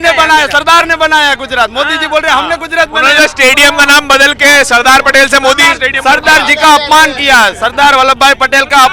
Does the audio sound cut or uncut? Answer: uncut